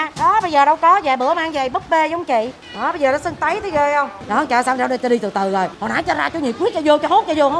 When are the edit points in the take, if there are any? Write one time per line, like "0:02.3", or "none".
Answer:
0:02.6
0:04.2
0:05.8